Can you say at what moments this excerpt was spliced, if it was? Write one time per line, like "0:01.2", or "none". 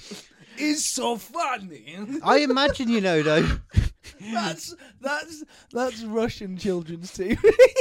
none